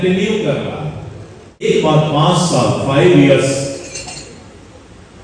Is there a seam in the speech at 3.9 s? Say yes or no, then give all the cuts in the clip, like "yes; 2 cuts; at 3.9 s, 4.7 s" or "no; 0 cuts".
no; 1 cut; at 1.6 s